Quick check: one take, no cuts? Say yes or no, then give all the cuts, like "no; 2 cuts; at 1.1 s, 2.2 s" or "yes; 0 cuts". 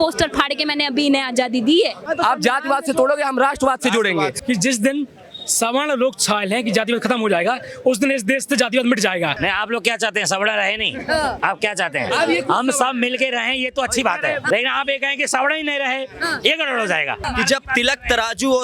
no; 6 cuts; at 2.0 s, 4.4 s, 9.3 s, 11.4 s, 14.4 s, 17.2 s